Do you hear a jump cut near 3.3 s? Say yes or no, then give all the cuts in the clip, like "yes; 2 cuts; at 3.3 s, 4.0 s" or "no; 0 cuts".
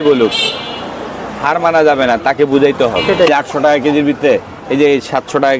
yes; 1 cut; at 3.3 s